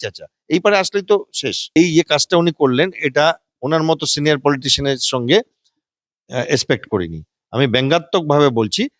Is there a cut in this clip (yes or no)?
no